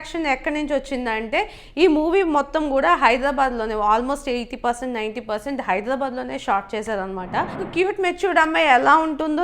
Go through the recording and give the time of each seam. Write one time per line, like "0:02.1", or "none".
0:07.7